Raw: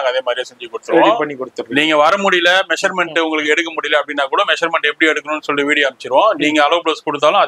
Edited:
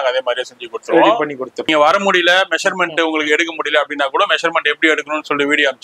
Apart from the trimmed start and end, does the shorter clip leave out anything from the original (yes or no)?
yes